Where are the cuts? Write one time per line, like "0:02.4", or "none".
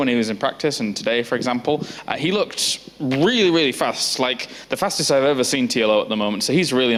none